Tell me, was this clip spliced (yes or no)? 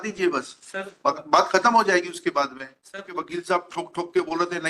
yes